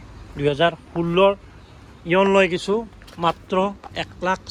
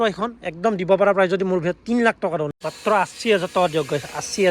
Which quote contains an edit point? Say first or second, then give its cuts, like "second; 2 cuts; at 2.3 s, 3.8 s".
second; 1 cut; at 2.6 s